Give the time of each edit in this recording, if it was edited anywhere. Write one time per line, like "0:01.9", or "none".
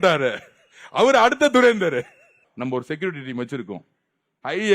0:02.4